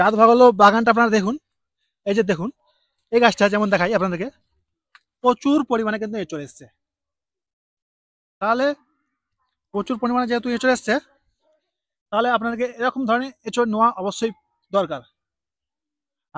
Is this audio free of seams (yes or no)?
yes